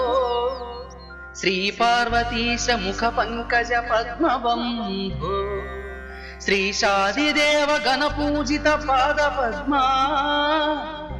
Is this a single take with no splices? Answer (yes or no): yes